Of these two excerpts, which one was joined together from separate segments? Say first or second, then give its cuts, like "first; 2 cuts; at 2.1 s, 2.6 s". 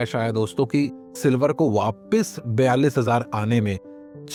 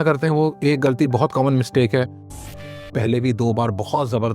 second; 1 cut; at 2.3 s